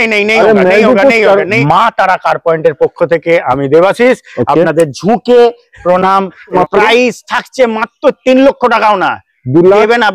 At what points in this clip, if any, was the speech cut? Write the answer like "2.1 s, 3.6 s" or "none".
1.5 s, 6.5 s